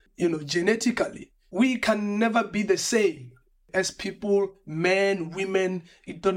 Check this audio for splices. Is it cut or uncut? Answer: cut